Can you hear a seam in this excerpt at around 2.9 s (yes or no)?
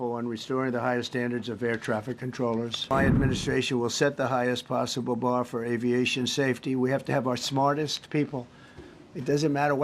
yes